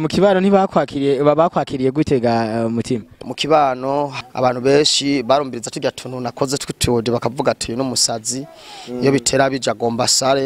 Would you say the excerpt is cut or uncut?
cut